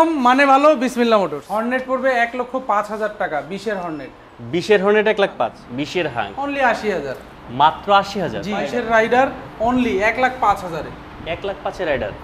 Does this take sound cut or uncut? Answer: cut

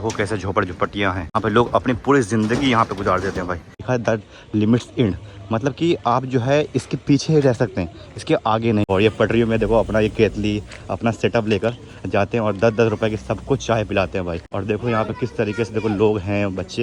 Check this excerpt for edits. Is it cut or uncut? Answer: cut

